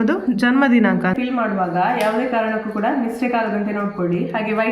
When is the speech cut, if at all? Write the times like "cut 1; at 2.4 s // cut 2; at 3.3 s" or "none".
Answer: cut 1; at 1.0 s

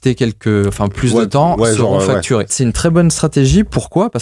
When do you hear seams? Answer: cut 1; at 2.5 s

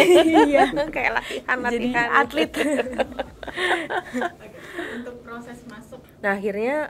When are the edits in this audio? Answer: cut 1; at 5.9 s

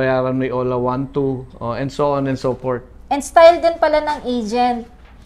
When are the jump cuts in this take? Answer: none

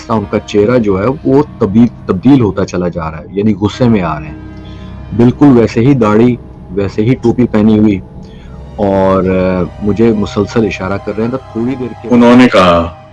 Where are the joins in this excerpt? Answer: cut 1; at 11.9 s

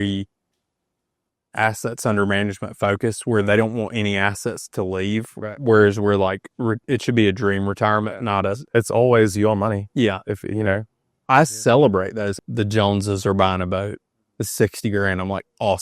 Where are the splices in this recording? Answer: cut 1; at 12.3 s

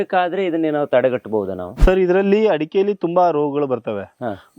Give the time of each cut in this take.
cut 1; at 1.6 s

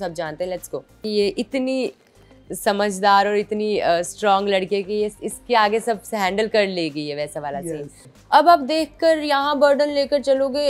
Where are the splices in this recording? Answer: cut 1; at 1.0 s // cut 2; at 8.1 s

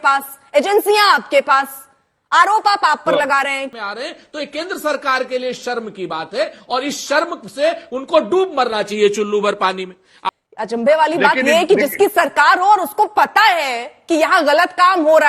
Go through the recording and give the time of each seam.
cut 1; at 3.7 s // cut 2; at 10.1 s

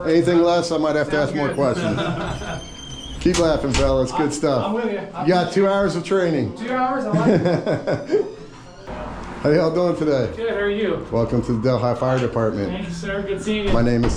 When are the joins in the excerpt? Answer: cut 1; at 8.9 s

